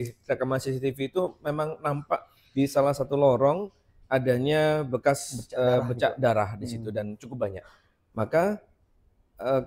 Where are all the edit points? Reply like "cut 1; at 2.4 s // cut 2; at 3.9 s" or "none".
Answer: none